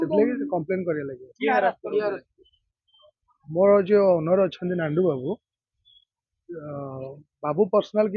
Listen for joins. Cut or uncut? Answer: uncut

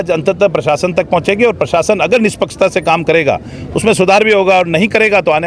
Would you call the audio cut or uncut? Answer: uncut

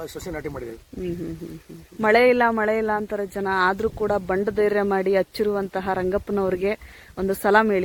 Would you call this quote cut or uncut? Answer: uncut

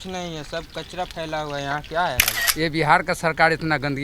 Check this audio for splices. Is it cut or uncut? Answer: cut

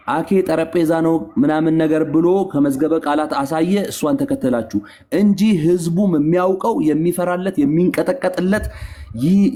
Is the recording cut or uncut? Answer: uncut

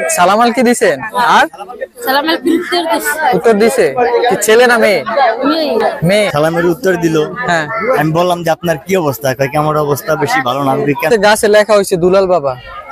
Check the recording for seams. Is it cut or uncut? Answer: cut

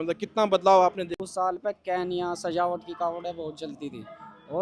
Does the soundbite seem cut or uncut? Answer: cut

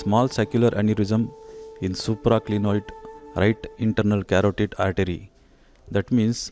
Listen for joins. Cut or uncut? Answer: uncut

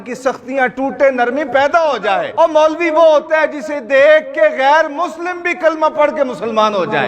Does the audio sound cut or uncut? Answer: cut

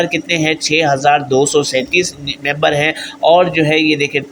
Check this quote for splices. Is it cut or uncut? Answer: uncut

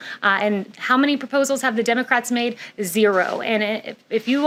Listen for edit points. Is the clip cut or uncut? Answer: uncut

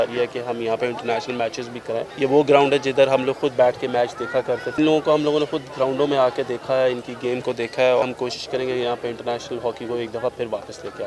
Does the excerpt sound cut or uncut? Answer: cut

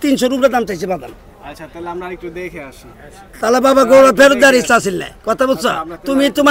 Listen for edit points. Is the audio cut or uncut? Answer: uncut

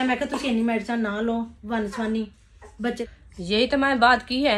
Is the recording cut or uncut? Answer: cut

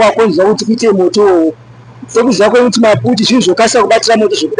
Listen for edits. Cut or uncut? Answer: uncut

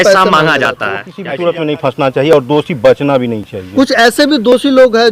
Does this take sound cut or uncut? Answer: cut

